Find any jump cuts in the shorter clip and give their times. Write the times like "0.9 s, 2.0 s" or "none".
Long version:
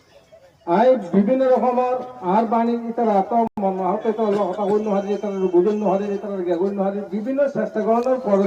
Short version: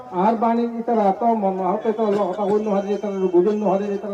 1.4 s